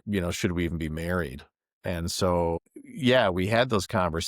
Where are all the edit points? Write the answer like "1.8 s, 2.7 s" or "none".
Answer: 1.7 s, 2.6 s